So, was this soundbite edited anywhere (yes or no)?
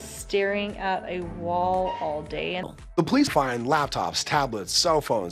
yes